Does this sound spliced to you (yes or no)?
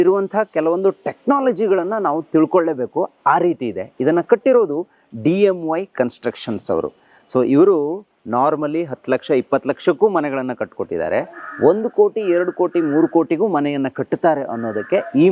no